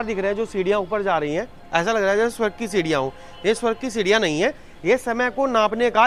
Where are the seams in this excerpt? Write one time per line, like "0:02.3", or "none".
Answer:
none